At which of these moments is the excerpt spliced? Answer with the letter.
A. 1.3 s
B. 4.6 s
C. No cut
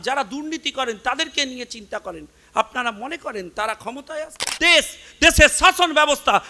B